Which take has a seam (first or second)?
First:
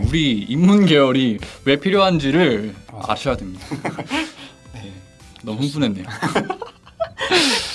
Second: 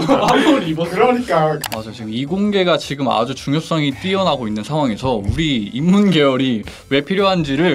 second